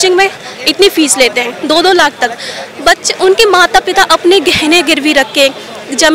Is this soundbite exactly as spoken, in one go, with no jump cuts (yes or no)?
yes